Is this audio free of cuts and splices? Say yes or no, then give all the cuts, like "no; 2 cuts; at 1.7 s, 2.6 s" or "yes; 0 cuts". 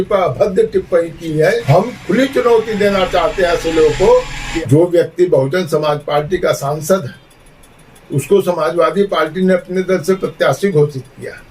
no; 2 cuts; at 1.6 s, 4.4 s